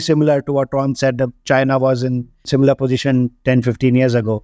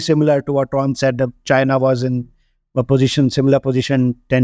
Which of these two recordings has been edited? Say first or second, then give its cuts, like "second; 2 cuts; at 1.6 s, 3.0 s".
first; 1 cut; at 2.5 s